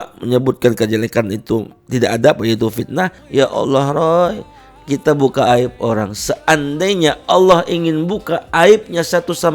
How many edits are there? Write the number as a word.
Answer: one